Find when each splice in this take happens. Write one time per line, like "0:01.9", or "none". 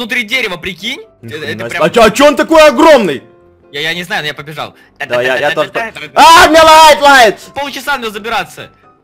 0:01.1
0:07.5